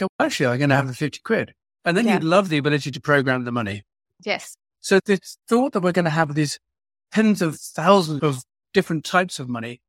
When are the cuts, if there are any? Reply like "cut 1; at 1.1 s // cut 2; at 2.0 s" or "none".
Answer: none